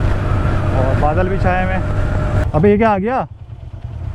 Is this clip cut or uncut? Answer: cut